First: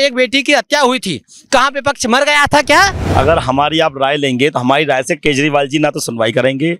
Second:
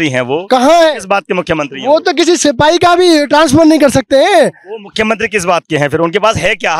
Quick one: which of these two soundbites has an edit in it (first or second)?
first